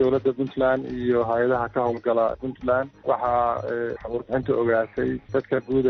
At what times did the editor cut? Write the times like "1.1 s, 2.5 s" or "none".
3.0 s

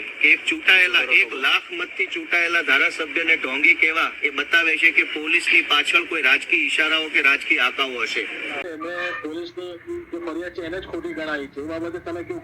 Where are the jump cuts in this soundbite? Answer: 8.7 s

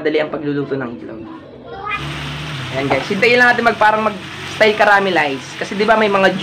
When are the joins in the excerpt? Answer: 2.1 s

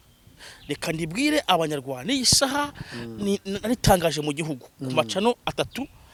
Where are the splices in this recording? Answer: none

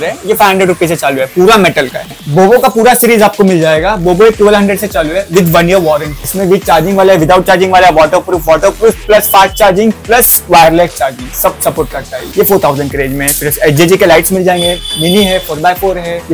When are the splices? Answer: none

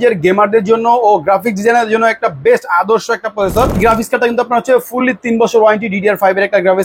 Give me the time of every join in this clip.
3.8 s

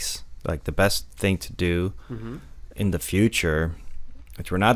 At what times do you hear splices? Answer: none

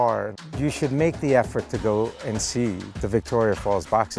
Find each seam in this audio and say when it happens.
2.9 s

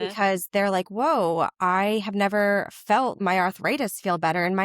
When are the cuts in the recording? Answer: 3.1 s

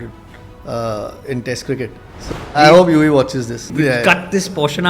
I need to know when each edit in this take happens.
2.6 s, 3.7 s

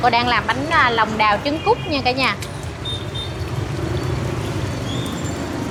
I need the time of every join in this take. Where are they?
none

